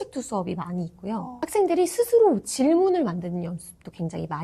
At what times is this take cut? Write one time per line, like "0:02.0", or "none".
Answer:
none